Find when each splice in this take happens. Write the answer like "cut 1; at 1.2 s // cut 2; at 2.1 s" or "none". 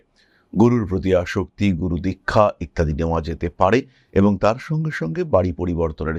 none